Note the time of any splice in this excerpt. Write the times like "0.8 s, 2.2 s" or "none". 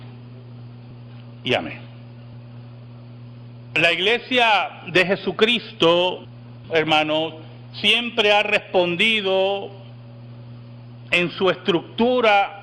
2.9 s